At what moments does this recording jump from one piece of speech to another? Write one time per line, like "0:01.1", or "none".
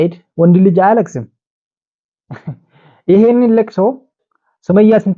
none